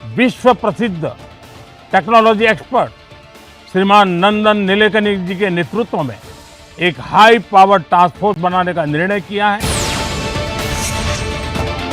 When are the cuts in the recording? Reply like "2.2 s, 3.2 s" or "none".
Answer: 9.6 s